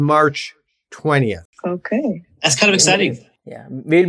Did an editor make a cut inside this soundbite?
yes; 1 cut; at 1.5 s

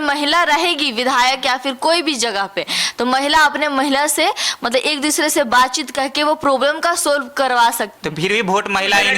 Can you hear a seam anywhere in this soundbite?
yes; 1 cut; at 7.9 s

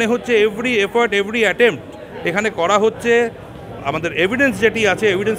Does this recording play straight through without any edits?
yes; 0 cuts

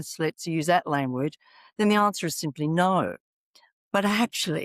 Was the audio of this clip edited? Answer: no; 0 cuts

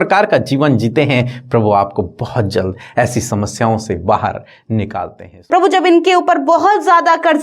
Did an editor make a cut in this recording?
yes; 1 cut; at 5.5 s

